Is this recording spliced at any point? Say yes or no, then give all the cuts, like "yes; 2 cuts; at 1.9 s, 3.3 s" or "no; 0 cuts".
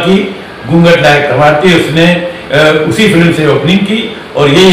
no; 0 cuts